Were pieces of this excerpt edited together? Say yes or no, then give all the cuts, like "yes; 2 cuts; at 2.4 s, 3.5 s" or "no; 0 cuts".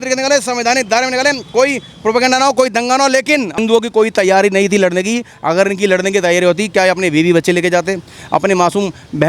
yes; 1 cut; at 3.5 s